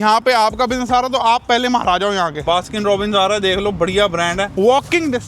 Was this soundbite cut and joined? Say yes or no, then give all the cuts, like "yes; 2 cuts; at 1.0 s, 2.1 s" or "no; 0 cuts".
yes; 2 cuts; at 2.4 s, 4.5 s